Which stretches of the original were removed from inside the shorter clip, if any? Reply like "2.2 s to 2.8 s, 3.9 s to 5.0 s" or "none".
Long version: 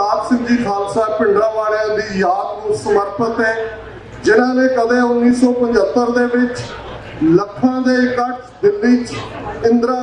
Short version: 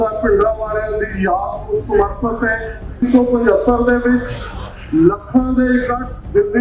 4.0 s to 5.3 s